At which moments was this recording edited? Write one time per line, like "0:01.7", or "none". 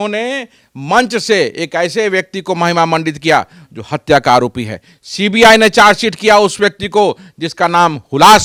none